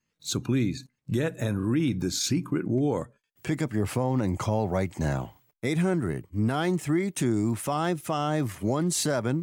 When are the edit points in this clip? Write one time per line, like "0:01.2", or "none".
none